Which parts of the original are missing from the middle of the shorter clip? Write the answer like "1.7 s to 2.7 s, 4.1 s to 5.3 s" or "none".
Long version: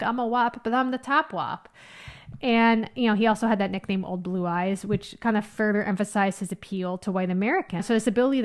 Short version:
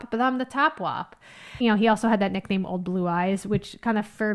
2.0 s to 2.9 s